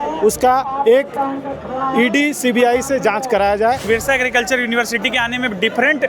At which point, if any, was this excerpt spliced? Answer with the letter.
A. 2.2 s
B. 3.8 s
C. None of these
B